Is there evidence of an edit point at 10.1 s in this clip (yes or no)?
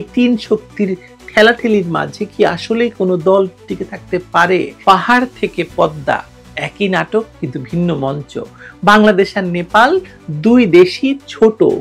no